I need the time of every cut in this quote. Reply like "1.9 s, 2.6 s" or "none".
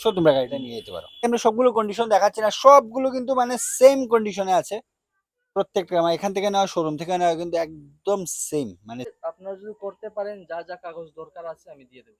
1.2 s, 9.1 s